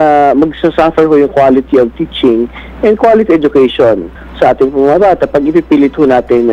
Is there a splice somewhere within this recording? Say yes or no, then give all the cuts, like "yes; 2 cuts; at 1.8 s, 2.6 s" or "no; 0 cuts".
no; 0 cuts